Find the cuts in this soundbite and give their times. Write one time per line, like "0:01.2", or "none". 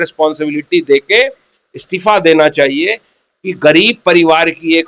none